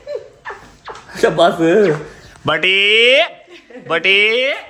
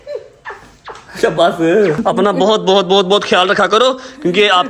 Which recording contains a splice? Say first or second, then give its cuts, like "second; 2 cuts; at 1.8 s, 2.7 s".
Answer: second; 1 cut; at 2.0 s